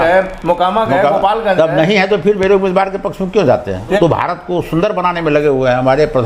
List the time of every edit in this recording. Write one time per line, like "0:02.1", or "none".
0:04.0